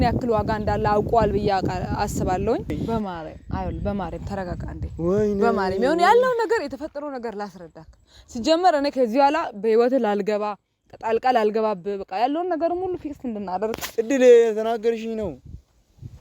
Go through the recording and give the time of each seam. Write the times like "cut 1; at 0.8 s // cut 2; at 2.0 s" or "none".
cut 1; at 2.8 s // cut 2; at 13.8 s